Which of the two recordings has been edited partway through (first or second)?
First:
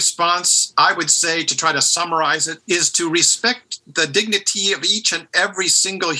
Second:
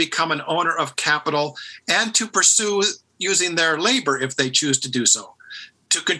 first